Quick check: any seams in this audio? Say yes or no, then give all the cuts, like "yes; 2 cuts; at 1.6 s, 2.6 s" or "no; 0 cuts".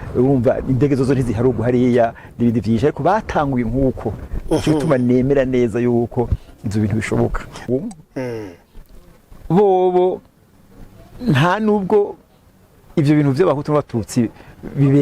yes; 1 cut; at 7.6 s